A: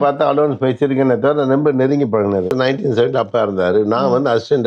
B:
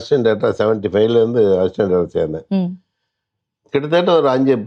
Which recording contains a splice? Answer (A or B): A